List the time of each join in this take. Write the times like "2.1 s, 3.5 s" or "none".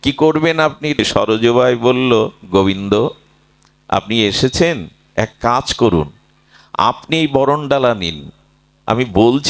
1.0 s